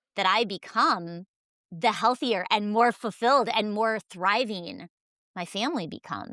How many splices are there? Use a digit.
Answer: 0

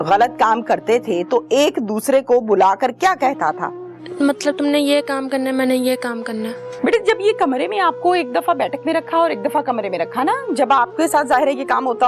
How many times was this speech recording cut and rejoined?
2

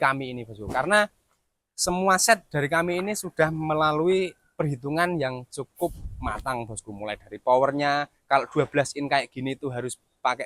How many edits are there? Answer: 0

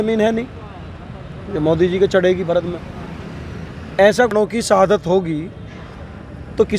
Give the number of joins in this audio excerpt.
1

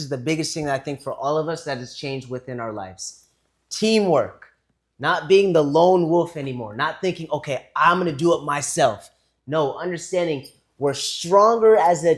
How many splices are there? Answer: 0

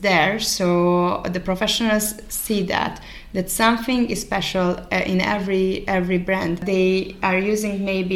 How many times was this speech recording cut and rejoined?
1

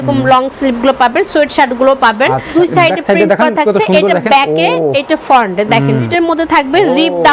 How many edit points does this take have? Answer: 2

